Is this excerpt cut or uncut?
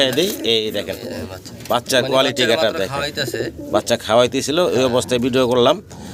uncut